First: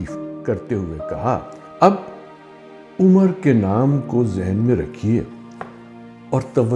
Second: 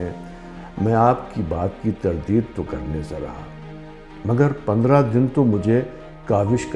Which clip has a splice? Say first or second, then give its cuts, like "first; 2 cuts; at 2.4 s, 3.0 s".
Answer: first; 1 cut; at 1.6 s